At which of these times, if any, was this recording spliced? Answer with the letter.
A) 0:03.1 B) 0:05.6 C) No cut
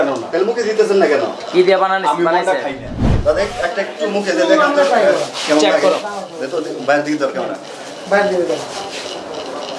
A